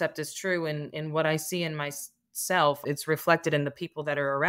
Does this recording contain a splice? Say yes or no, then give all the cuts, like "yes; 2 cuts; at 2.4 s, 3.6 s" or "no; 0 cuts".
yes; 1 cut; at 2.8 s